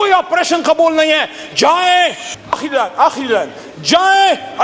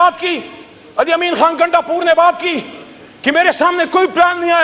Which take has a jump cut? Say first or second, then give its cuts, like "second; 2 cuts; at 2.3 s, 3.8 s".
first; 1 cut; at 2.2 s